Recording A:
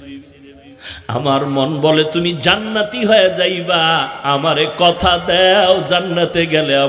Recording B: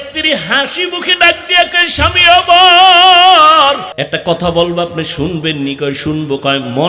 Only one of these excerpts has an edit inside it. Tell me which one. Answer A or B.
B